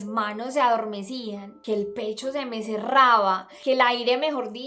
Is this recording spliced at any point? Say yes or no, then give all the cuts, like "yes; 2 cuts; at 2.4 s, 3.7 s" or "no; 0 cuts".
yes; 2 cuts; at 1.5 s, 3.5 s